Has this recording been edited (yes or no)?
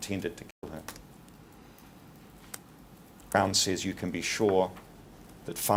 no